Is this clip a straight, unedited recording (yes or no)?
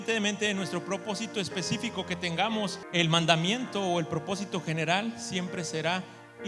no